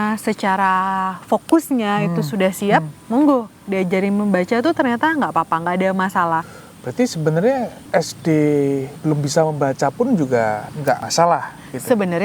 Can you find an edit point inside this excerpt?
yes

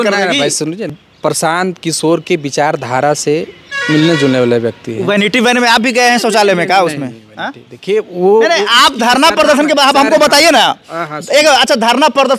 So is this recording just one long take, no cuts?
no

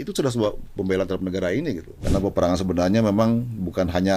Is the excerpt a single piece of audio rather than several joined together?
no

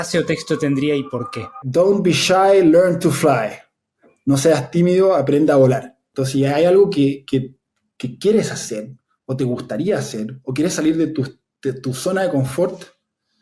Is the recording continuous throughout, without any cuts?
no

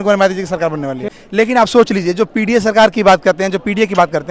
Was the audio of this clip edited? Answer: yes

